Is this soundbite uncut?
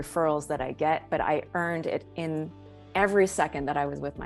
yes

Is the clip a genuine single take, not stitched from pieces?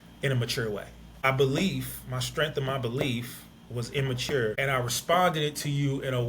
no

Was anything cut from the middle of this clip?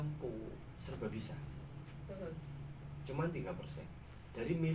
no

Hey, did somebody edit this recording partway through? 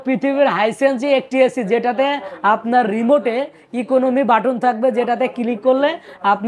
no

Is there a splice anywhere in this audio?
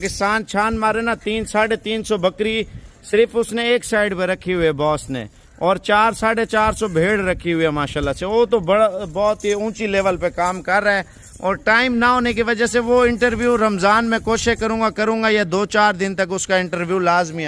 no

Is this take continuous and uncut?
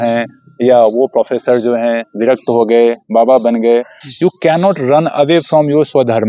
no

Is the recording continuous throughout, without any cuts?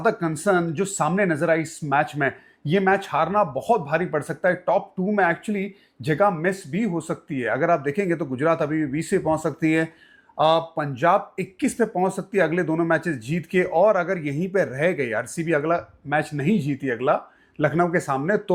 yes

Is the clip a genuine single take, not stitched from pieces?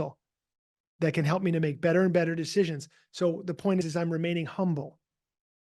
no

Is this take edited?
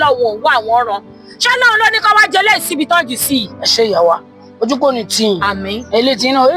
no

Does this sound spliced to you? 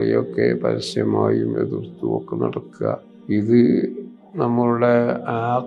yes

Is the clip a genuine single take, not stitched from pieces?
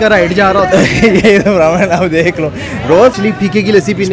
no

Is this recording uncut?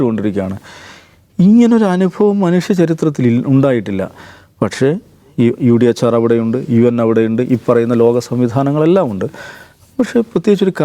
yes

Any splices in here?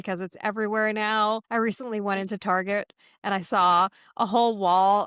yes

